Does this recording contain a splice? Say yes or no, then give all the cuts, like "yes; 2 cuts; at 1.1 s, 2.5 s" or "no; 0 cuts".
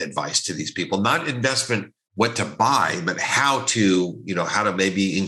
no; 0 cuts